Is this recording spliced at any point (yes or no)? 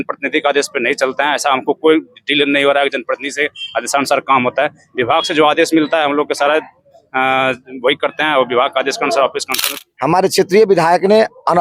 yes